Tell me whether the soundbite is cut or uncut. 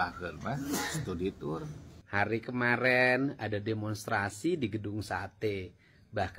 cut